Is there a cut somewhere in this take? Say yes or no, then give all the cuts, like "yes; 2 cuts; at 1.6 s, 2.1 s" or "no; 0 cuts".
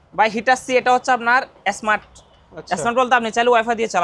no; 0 cuts